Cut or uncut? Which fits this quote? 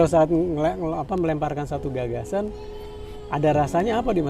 uncut